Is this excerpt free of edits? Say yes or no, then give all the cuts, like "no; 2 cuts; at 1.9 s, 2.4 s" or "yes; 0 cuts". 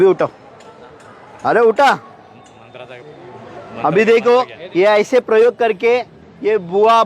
no; 1 cut; at 4.6 s